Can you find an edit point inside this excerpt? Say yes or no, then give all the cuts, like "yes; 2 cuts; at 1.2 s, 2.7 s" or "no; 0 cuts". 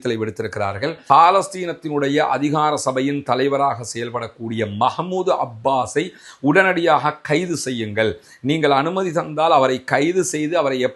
yes; 1 cut; at 1.0 s